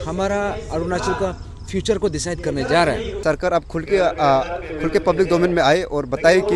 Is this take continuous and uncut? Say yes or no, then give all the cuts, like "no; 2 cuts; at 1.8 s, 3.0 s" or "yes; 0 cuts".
no; 1 cut; at 3.1 s